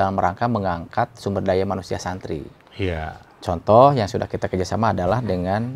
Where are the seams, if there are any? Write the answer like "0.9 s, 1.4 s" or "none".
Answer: none